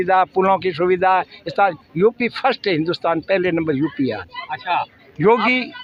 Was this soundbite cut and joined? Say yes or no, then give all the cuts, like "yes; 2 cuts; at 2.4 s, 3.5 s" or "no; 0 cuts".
no; 0 cuts